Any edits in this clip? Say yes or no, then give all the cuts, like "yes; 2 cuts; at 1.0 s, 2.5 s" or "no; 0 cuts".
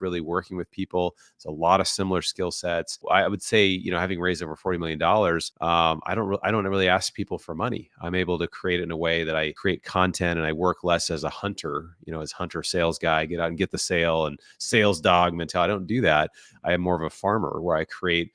yes; 3 cuts; at 3.0 s, 5.5 s, 9.5 s